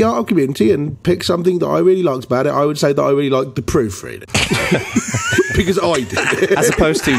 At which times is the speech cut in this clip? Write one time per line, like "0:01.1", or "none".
0:04.1